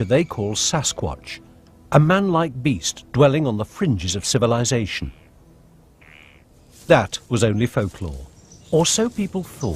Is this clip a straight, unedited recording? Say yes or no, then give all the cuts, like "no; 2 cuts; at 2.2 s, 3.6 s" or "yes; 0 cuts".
no; 1 cut; at 3.8 s